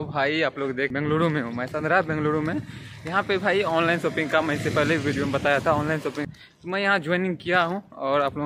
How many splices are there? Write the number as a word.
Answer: two